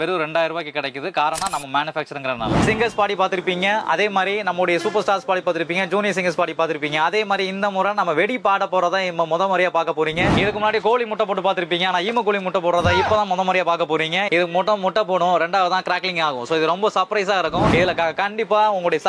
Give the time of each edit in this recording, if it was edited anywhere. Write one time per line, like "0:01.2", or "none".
0:02.6
0:10.3
0:14.3
0:17.7